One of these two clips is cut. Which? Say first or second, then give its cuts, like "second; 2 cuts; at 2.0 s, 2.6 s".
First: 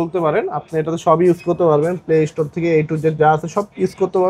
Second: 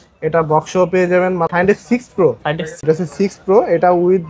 second; 2 cuts; at 1.5 s, 2.8 s